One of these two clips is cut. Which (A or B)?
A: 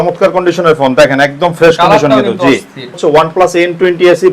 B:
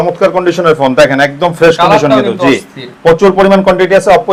A